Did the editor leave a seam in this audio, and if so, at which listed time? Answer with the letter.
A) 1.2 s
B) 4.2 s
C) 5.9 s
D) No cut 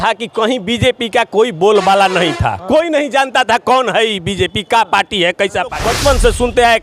C